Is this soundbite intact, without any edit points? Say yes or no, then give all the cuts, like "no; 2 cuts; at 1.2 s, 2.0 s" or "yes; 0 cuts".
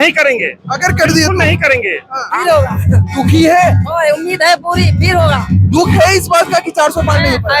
no; 1 cut; at 2.3 s